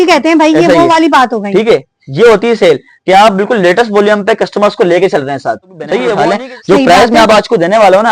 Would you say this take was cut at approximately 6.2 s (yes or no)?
yes